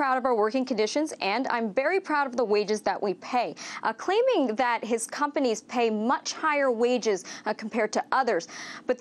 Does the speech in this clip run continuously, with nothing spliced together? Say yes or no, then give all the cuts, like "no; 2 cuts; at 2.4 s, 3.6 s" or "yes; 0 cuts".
no; 1 cut; at 8.1 s